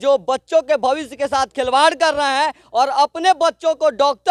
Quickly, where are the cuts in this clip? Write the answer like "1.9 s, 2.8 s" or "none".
none